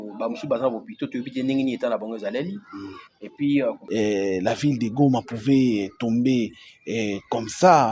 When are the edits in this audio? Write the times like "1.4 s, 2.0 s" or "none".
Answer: 3.8 s